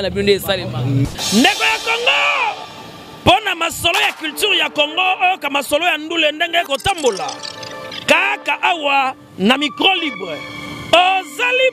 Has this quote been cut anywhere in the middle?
yes; 1 cut; at 1.0 s

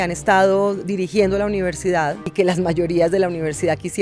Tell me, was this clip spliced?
no; 0 cuts

